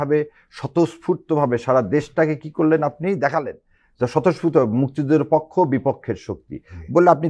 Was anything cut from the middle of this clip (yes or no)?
no